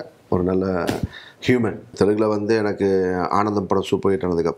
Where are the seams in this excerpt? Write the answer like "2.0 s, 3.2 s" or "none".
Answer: 1.9 s